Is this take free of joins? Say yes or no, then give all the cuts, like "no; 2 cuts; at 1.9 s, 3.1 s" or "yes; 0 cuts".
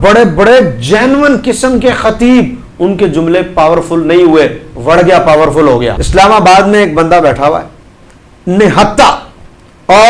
no; 1 cut; at 6.0 s